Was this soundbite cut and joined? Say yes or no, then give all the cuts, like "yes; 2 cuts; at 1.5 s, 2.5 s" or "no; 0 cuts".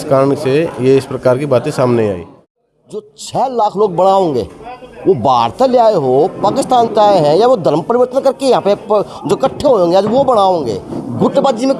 yes; 1 cut; at 2.6 s